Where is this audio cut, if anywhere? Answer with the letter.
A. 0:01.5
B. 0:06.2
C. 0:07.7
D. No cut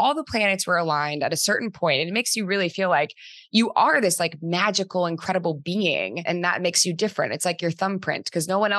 B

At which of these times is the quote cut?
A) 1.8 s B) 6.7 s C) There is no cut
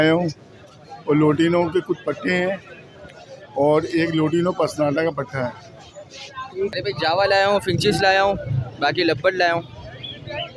B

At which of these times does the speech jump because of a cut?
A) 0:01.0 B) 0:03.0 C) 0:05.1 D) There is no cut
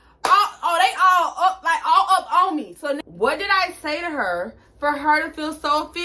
B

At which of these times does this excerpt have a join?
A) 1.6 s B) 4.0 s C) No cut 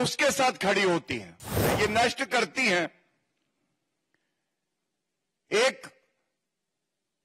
A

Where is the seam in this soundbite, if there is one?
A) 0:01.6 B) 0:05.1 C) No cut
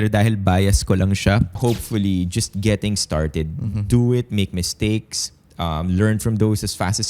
A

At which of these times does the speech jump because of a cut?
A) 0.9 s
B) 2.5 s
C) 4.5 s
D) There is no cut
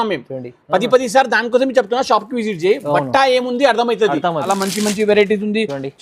C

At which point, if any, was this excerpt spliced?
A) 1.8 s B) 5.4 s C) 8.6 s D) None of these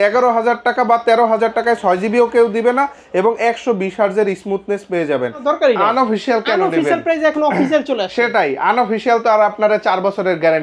B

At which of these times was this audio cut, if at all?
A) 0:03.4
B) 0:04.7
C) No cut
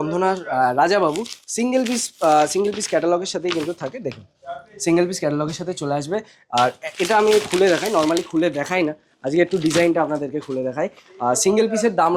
C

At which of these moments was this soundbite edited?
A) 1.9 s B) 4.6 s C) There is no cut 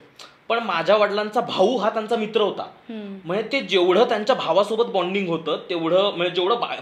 C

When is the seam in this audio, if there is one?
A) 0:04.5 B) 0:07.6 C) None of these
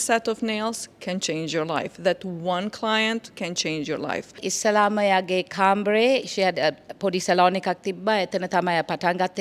A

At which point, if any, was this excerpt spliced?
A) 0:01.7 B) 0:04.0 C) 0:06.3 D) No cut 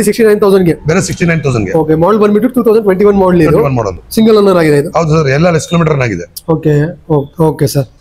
D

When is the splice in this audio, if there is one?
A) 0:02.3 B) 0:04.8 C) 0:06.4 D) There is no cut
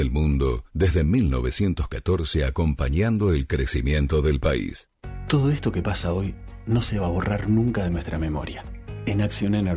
B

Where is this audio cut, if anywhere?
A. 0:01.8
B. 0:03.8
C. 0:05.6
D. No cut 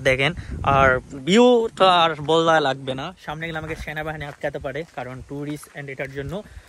D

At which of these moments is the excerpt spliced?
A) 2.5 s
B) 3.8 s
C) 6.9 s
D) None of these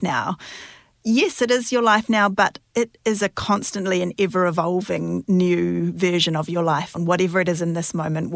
C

